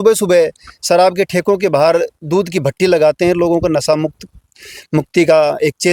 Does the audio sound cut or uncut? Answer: uncut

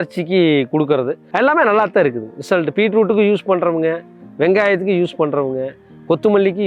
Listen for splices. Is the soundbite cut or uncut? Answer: cut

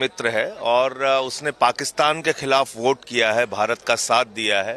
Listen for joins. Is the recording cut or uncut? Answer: uncut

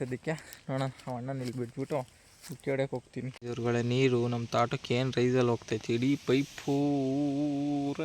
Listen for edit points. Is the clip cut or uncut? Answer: cut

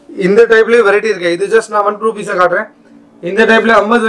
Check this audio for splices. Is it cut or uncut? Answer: uncut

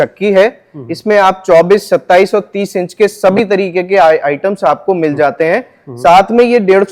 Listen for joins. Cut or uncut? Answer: uncut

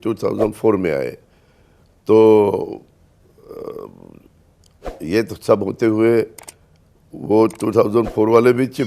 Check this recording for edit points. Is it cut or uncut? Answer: uncut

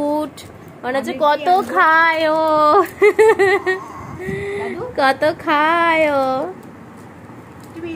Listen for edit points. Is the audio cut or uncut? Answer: uncut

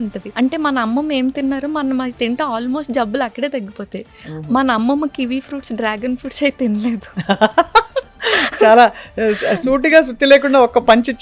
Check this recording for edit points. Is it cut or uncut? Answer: uncut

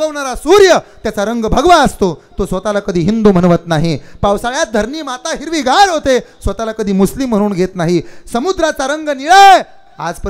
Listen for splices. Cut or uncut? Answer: uncut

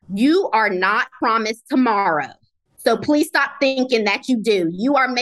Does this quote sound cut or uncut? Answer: cut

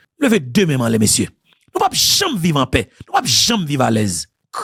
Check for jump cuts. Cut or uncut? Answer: uncut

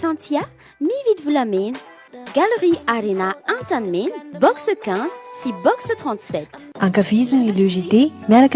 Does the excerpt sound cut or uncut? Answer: uncut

